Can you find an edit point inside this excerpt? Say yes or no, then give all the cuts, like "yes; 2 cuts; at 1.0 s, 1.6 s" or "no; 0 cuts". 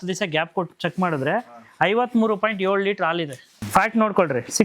yes; 1 cut; at 3.5 s